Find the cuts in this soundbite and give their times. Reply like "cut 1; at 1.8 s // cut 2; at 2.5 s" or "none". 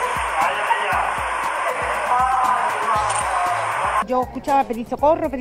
cut 1; at 4.0 s

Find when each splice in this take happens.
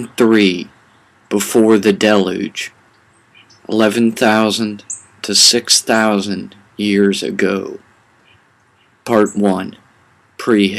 none

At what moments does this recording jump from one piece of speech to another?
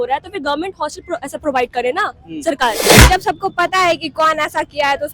cut 1; at 3.1 s

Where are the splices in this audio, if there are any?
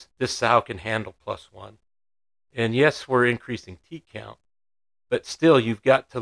none

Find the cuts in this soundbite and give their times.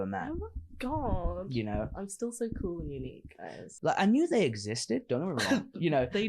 cut 1; at 3.7 s

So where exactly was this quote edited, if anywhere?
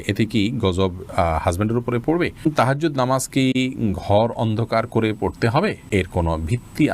cut 1; at 2.4 s // cut 2; at 5.8 s

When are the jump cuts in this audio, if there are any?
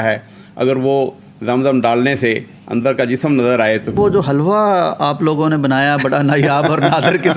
cut 1; at 4.0 s

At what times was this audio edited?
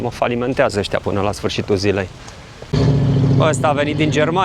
cut 1; at 2.7 s

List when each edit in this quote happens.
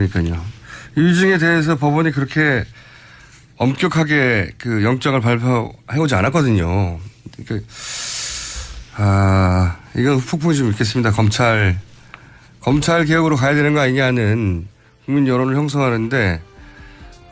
none

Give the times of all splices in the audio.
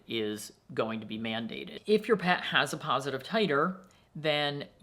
cut 1; at 1.7 s

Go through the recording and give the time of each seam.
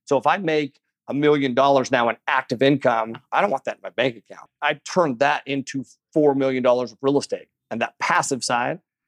cut 1; at 3.2 s // cut 2; at 4.5 s // cut 3; at 7.6 s

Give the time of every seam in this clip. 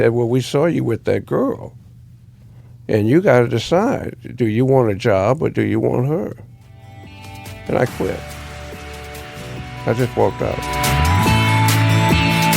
cut 1; at 10.7 s

